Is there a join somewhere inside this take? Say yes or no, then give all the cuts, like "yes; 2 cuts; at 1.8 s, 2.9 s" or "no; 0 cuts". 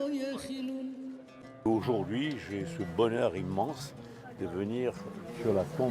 yes; 1 cut; at 1.7 s